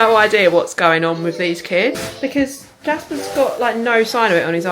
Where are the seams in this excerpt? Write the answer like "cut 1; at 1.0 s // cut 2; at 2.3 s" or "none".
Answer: cut 1; at 2.0 s